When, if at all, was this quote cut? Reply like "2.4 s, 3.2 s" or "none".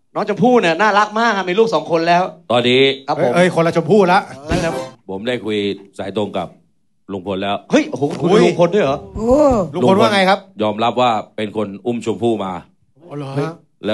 4.8 s